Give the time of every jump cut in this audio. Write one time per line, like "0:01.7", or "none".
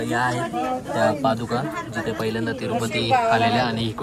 none

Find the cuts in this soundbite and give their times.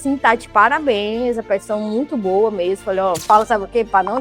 0:03.2

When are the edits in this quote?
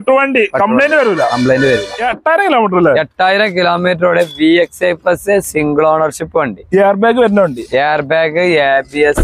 0:02.0

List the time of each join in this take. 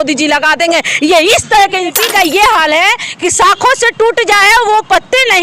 0:02.0

